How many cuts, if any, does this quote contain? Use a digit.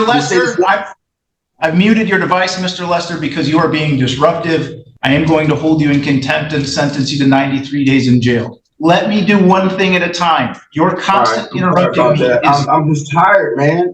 2